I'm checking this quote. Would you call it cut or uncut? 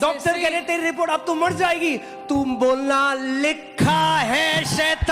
uncut